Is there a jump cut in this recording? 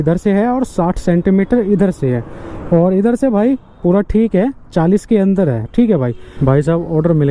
yes; 1 cut; at 6.2 s

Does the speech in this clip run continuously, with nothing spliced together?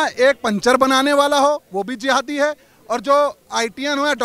yes; 0 cuts

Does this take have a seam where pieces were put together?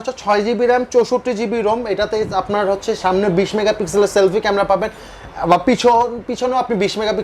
no; 0 cuts

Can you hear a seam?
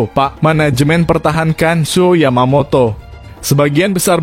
no; 0 cuts

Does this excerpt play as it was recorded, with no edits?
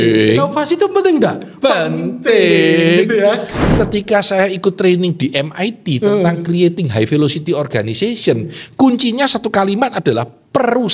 no; 1 cut; at 3.7 s

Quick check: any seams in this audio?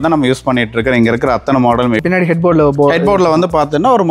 yes; 1 cut; at 2.0 s

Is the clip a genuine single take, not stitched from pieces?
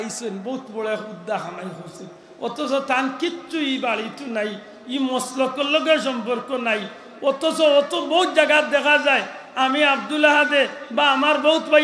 yes; 0 cuts

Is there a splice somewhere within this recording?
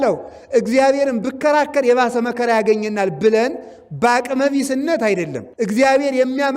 yes; 1 cut; at 5.4 s

